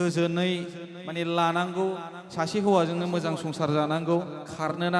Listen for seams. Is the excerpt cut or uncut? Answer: uncut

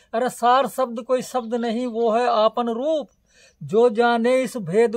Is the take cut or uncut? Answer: uncut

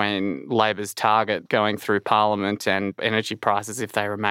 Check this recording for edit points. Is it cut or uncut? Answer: cut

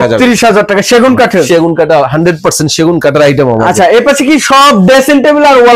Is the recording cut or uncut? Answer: uncut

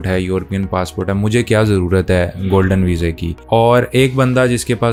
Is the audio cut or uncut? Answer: uncut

